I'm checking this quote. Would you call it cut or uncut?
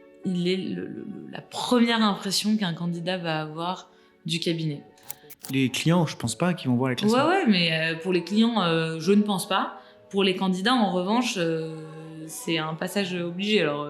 cut